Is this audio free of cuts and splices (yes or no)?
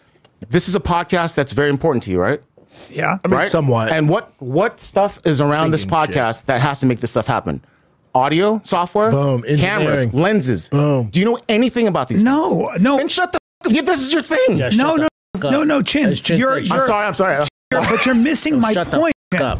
yes